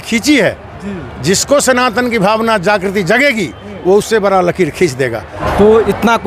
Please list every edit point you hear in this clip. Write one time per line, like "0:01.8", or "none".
0:05.3